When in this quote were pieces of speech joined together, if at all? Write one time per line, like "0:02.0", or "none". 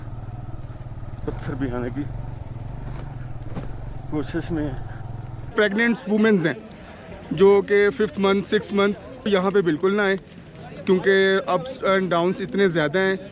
0:05.5
0:09.3